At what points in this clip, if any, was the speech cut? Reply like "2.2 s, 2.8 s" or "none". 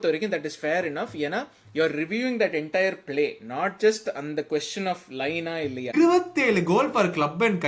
5.9 s